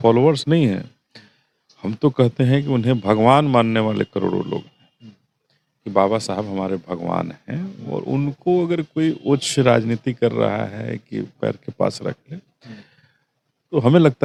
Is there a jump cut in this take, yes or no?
no